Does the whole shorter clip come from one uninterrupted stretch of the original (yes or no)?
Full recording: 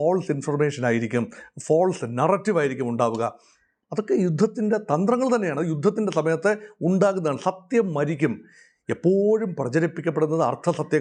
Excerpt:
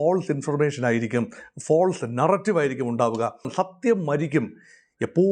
no